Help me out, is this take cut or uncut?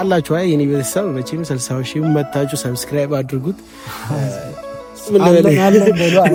uncut